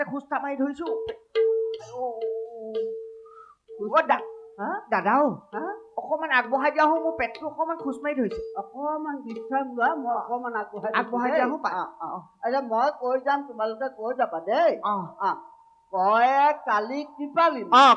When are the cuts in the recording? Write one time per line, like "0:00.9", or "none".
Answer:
none

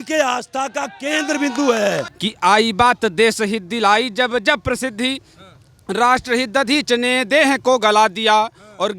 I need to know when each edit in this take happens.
0:02.2

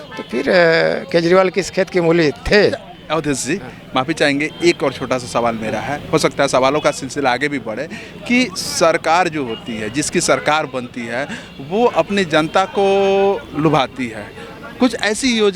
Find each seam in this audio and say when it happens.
none

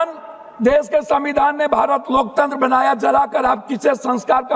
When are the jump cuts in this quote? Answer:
none

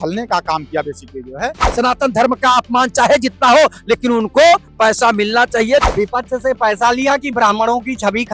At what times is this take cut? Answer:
0:01.7
0:05.9

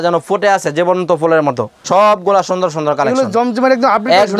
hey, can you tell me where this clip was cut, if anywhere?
0:01.8

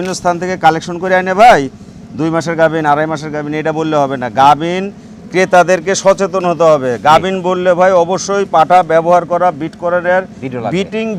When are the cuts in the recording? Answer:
none

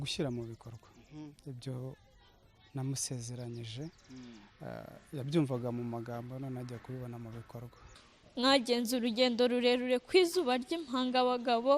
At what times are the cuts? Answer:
0:07.9

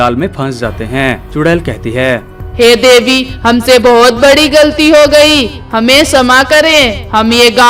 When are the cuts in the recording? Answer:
none

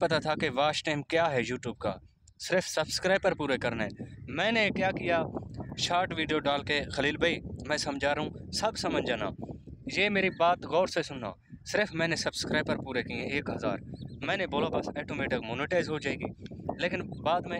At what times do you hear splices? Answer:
none

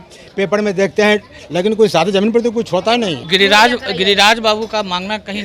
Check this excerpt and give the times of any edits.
0:03.2

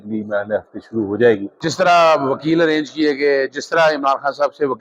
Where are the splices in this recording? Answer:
0:01.5

